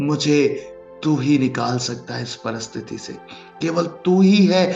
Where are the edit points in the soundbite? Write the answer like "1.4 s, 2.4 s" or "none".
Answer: none